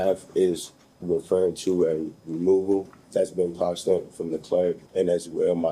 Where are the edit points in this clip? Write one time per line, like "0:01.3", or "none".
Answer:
0:03.0
0:04.8